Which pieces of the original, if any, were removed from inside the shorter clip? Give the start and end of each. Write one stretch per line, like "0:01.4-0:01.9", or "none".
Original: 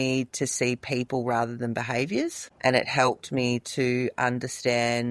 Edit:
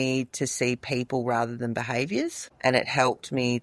none